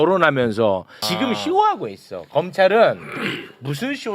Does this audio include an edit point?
yes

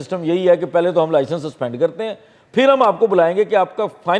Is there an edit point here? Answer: no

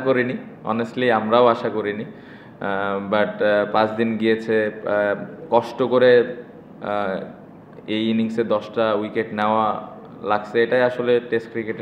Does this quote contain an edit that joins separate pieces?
no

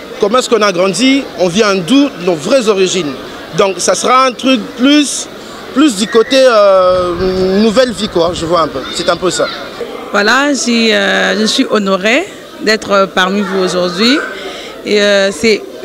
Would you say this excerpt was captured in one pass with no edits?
no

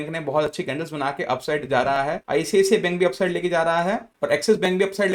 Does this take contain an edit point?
no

